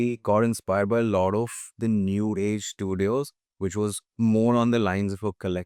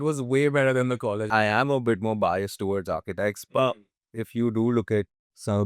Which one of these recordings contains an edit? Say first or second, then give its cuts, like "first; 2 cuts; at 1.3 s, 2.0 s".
second; 1 cut; at 1.3 s